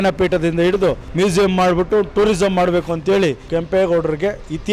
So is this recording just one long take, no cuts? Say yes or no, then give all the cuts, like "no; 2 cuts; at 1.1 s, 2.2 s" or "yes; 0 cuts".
no; 2 cuts; at 1.0 s, 3.4 s